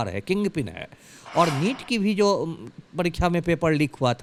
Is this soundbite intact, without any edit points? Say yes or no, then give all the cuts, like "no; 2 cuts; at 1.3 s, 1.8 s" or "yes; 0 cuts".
yes; 0 cuts